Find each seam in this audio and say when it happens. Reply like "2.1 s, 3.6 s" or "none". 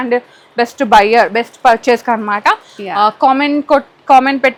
none